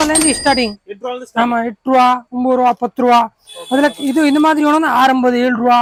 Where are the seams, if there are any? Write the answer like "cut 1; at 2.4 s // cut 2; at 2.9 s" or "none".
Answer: none